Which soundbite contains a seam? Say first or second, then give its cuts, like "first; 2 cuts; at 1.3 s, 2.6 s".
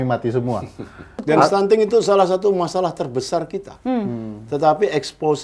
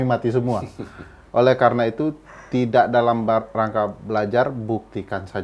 first; 1 cut; at 1.2 s